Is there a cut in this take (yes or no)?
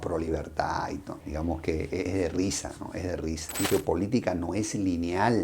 yes